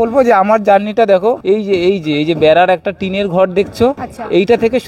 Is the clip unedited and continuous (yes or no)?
yes